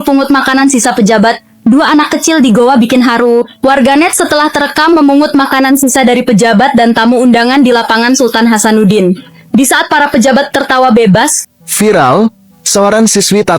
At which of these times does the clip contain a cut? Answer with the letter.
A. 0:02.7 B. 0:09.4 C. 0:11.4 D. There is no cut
C